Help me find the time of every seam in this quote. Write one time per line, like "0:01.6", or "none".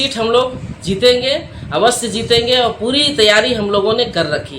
none